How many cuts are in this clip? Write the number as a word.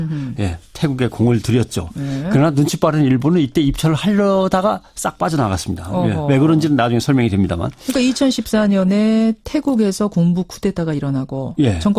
zero